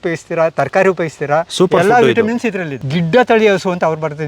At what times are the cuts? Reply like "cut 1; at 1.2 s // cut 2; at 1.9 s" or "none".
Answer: cut 1; at 2.7 s